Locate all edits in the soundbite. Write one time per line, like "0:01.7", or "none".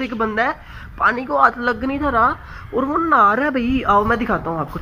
0:03.8